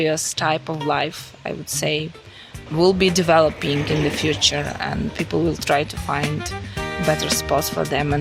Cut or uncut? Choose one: uncut